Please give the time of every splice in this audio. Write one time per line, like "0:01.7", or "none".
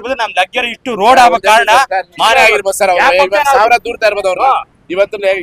0:02.3